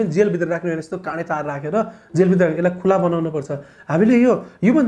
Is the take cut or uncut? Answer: uncut